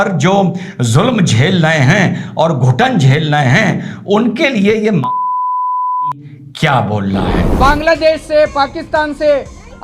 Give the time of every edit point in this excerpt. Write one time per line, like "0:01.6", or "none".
0:07.4

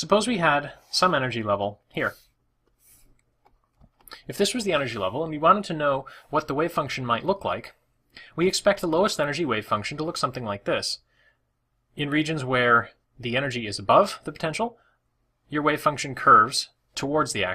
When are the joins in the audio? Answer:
0:01.6

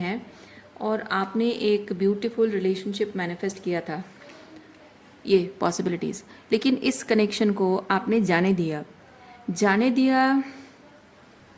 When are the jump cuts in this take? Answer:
none

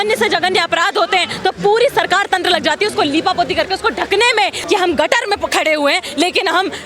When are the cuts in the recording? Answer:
0:04.6

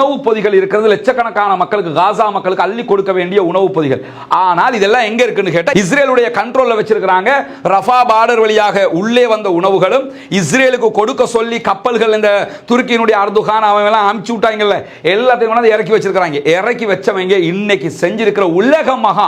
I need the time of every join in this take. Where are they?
0:05.7

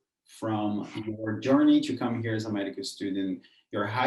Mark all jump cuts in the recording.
none

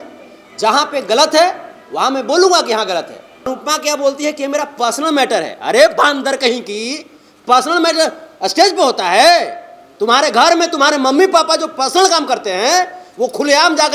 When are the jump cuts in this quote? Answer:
0:03.5

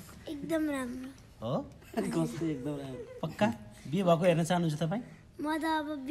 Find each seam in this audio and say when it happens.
none

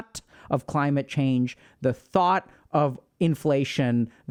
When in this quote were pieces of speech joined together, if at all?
none

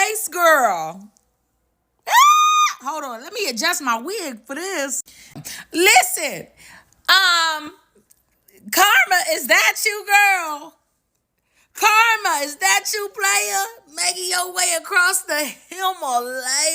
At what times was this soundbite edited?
0:05.3

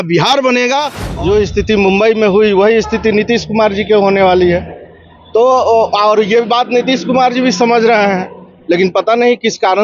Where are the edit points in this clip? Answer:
0:01.0

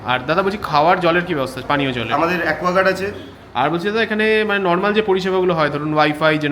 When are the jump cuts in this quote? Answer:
0:03.2

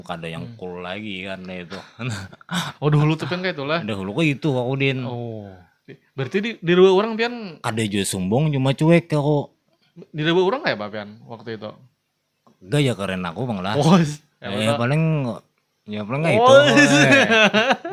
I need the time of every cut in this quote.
none

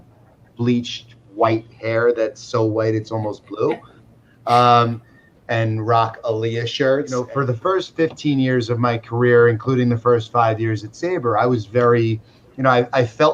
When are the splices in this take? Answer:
0:07.2

